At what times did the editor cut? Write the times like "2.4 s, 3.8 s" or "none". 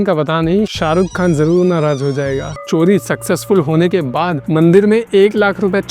2.5 s

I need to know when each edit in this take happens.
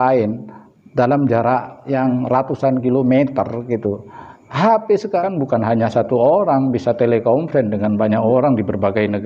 1.8 s, 5.2 s

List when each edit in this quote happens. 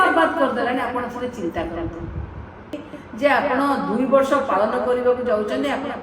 2.9 s

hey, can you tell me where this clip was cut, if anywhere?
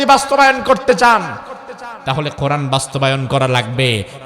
none

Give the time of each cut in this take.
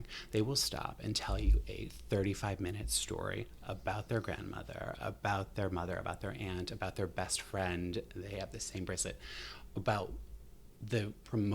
none

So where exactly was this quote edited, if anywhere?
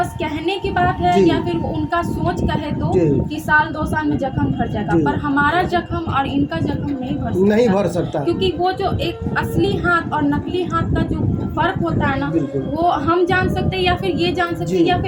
none

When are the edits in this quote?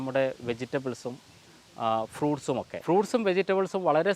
2.7 s

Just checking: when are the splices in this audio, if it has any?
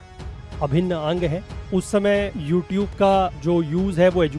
1.5 s, 2.4 s, 3.4 s

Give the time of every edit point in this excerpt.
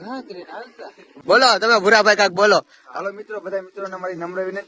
1.1 s

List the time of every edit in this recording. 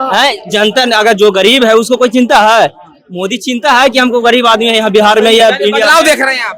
none

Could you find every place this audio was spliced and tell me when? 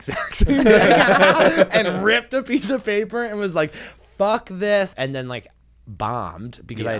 4.9 s

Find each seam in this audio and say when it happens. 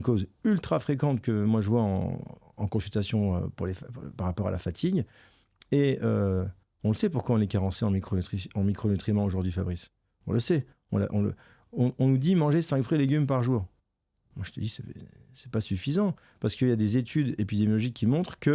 none

